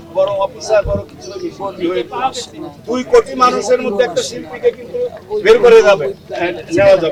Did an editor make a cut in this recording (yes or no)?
no